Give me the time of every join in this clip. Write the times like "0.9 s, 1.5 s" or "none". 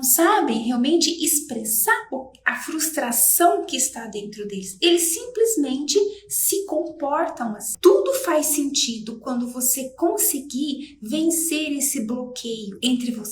7.6 s